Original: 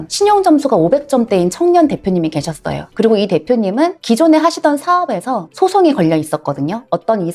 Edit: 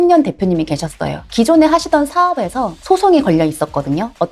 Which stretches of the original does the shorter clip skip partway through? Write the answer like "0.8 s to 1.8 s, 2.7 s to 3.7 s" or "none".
2.9 s to 4.0 s